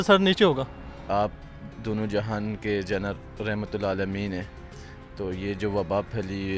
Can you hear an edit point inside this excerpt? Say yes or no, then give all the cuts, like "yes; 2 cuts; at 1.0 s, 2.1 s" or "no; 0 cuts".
yes; 1 cut; at 1.1 s